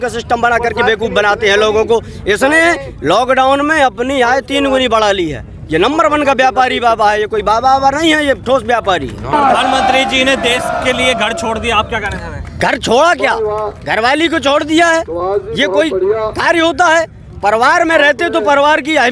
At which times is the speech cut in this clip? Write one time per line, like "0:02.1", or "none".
0:09.3